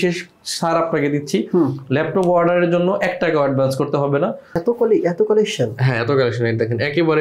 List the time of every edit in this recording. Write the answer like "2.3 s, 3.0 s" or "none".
4.6 s